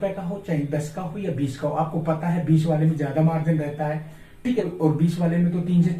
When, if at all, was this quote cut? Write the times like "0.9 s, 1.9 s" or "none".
4.6 s